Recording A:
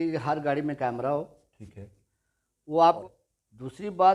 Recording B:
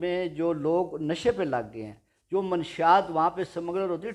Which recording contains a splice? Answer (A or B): A